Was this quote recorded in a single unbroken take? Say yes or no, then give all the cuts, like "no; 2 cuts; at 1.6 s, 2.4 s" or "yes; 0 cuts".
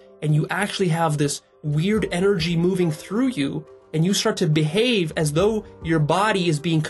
yes; 0 cuts